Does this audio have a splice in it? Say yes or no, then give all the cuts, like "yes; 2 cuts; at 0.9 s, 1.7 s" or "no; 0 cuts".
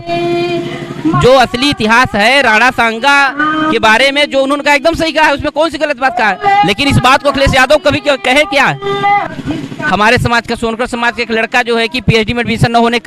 yes; 1 cut; at 9.2 s